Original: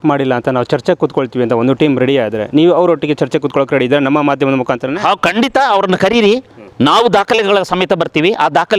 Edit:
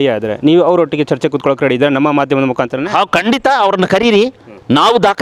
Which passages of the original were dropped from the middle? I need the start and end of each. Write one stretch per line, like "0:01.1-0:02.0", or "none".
none